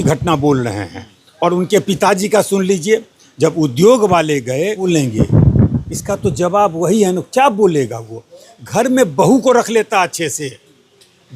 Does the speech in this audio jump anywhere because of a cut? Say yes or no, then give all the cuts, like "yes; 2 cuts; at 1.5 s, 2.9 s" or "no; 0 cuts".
yes; 1 cut; at 4.9 s